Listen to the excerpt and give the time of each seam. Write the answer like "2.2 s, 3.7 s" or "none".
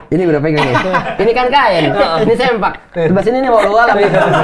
none